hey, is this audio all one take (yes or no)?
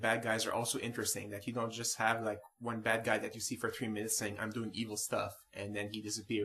yes